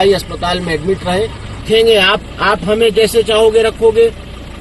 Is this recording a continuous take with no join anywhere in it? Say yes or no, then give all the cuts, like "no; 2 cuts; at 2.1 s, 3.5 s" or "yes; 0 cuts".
no; 1 cut; at 1.5 s